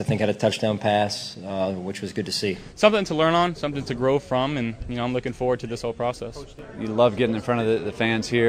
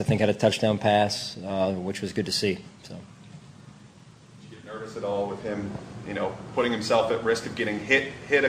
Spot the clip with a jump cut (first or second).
first